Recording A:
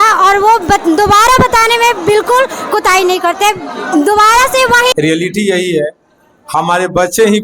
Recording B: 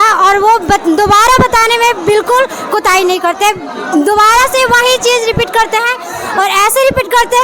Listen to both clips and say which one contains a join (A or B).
A